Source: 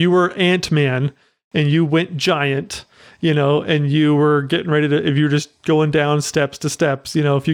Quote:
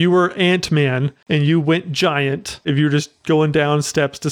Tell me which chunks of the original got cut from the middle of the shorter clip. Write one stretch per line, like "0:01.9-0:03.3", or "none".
0:01.1-0:01.4
0:02.9-0:05.1